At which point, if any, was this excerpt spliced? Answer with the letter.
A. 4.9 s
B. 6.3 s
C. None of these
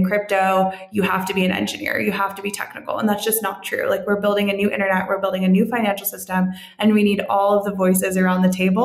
C